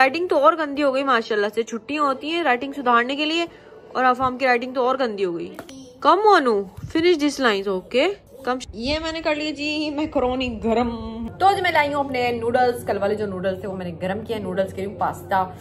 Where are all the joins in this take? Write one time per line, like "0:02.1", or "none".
none